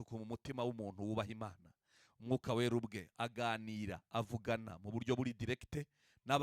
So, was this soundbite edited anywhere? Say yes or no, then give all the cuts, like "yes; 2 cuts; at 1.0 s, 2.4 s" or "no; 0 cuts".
no; 0 cuts